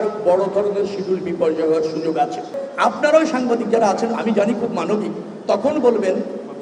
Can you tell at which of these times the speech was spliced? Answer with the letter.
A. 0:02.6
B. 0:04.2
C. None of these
A